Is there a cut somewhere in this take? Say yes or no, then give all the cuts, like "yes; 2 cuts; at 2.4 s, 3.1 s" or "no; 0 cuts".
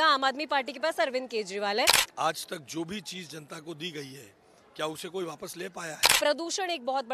yes; 2 cuts; at 2.0 s, 6.1 s